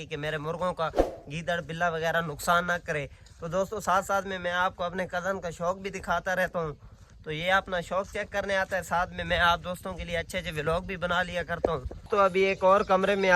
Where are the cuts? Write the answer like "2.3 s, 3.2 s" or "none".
11.9 s